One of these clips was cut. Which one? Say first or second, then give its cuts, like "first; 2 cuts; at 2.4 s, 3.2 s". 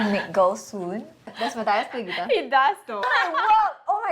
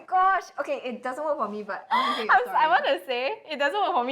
first; 2 cuts; at 1.3 s, 3.0 s